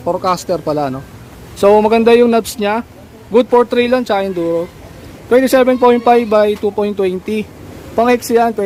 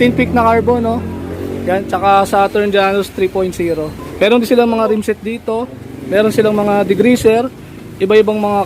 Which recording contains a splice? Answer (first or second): second